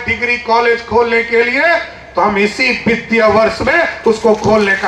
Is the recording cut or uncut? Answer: uncut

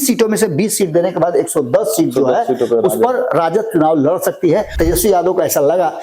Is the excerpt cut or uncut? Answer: cut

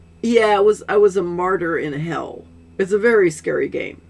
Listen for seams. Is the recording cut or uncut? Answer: uncut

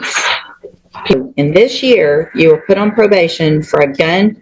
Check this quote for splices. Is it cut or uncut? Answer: cut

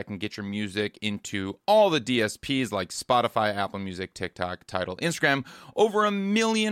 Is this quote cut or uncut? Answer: uncut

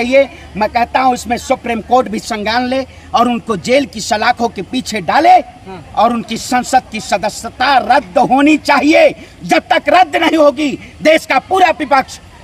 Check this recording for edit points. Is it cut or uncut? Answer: uncut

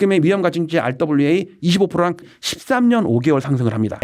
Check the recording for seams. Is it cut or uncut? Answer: cut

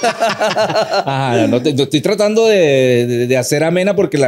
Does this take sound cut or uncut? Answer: uncut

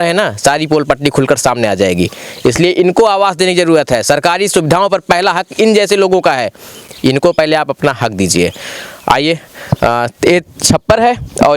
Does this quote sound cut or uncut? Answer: uncut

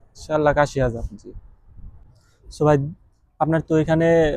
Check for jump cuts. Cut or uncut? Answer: uncut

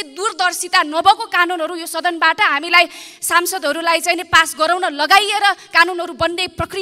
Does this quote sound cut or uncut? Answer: uncut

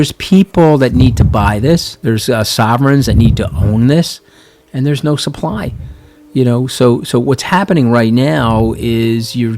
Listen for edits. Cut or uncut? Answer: cut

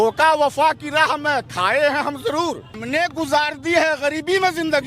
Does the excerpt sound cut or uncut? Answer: cut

